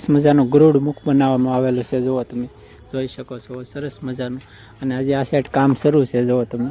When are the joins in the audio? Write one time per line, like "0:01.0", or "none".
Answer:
none